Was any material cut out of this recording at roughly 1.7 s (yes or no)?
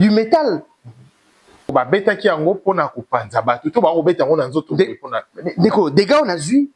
yes